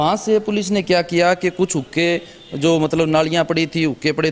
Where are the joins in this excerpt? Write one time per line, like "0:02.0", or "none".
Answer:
none